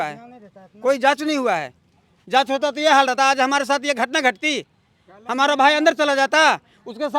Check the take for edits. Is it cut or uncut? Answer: uncut